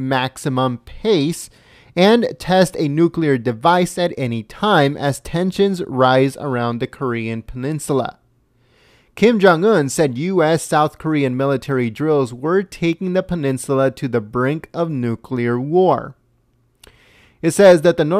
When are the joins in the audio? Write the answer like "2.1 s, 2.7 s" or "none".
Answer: 6.9 s